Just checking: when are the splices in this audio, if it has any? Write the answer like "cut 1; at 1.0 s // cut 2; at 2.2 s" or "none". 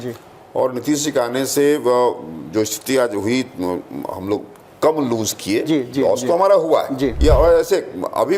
cut 1; at 7.2 s